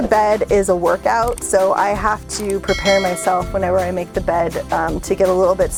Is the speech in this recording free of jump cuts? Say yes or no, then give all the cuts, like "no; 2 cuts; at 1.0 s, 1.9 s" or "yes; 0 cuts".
yes; 0 cuts